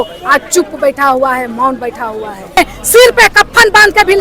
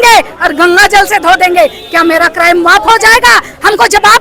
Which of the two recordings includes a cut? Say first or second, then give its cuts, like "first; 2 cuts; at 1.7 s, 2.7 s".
first; 1 cut; at 2.6 s